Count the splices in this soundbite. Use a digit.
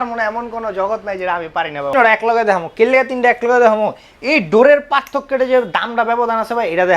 1